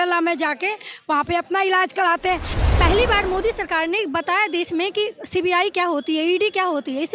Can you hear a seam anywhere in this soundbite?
yes; 1 cut; at 2.6 s

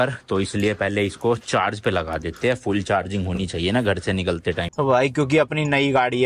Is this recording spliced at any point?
yes; 1 cut; at 4.7 s

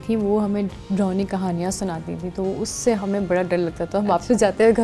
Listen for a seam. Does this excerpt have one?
no; 0 cuts

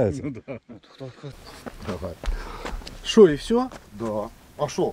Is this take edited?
yes; 1 cut; at 1.3 s

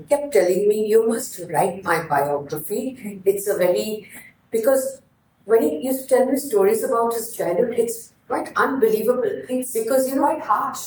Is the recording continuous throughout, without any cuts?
yes; 0 cuts

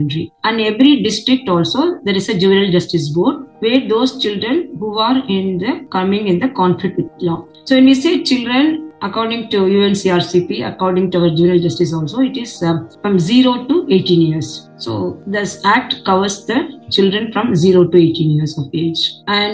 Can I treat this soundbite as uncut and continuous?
yes; 0 cuts

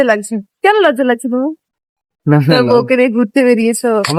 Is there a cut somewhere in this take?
no; 0 cuts

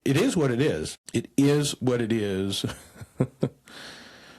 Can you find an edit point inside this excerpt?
yes; 1 cut; at 1.0 s

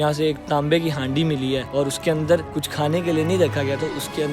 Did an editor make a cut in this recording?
yes; 2 cuts; at 1.6 s, 2.6 s

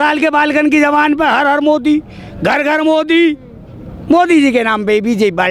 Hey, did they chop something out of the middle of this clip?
no; 0 cuts

